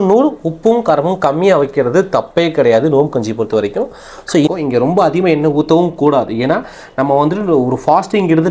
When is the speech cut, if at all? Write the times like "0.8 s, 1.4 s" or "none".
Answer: 4.5 s